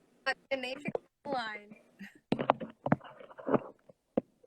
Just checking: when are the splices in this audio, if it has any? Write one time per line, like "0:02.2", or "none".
0:01.5